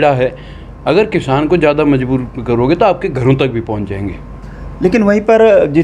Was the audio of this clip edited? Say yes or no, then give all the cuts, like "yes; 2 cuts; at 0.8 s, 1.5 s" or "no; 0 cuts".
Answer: no; 0 cuts